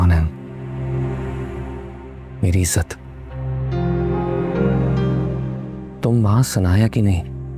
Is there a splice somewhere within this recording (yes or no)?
no